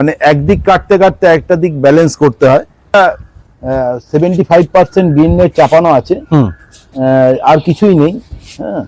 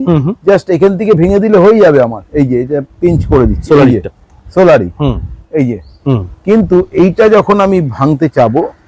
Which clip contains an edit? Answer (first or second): first